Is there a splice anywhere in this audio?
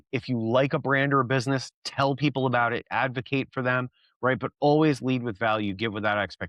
no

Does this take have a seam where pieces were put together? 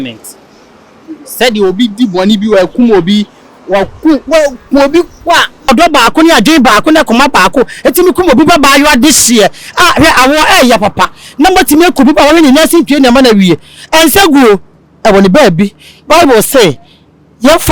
yes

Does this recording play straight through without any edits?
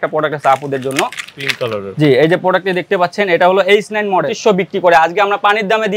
no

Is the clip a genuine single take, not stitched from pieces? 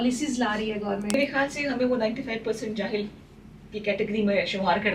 no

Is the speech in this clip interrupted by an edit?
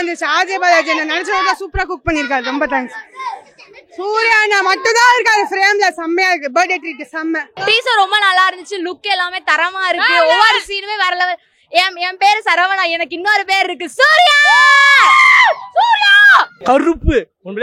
yes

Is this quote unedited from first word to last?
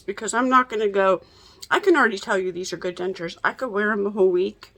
yes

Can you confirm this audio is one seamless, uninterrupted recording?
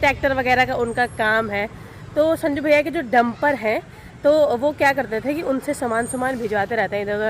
yes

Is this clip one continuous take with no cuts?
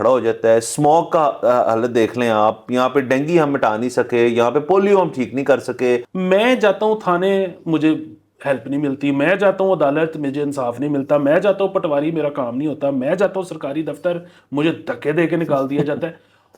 no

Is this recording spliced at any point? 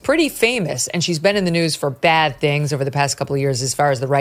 no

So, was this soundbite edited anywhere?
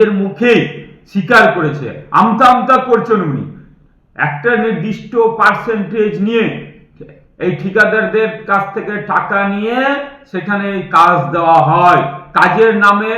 no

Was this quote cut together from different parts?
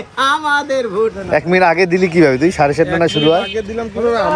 yes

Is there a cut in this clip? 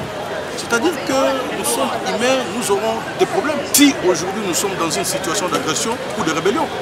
yes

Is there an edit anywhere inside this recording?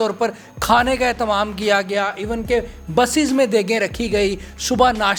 no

